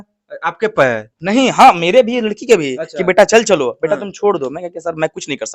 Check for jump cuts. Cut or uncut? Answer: uncut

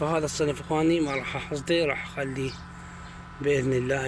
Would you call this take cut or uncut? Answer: uncut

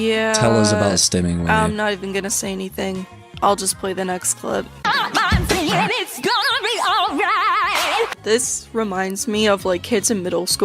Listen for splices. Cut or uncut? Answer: cut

